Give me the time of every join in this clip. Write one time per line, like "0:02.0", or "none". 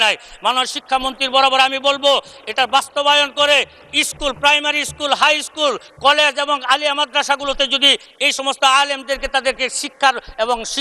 none